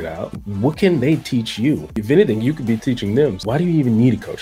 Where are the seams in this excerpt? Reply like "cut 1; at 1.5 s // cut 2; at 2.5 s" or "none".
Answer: none